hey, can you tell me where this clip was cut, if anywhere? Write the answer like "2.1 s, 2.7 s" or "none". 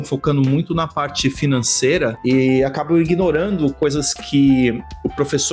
none